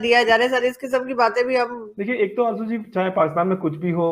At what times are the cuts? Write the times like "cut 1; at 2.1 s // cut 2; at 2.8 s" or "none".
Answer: cut 1; at 1.9 s